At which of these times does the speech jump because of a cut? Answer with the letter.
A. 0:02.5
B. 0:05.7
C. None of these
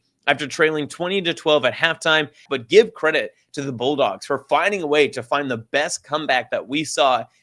A